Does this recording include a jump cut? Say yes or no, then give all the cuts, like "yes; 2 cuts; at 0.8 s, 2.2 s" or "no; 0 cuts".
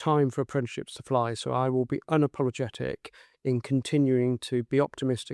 no; 0 cuts